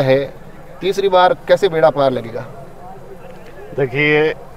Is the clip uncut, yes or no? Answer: yes